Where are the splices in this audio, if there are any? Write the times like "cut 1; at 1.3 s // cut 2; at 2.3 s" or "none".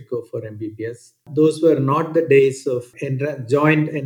cut 1; at 1.2 s // cut 2; at 2.9 s